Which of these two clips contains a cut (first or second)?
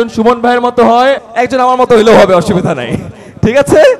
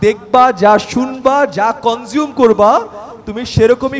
first